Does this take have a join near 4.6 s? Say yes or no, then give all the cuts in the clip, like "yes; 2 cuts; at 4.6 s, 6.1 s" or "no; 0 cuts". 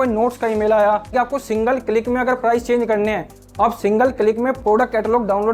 yes; 2 cuts; at 1.1 s, 4.6 s